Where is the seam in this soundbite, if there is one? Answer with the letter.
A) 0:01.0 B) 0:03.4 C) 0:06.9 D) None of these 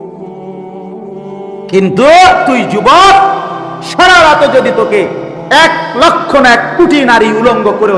A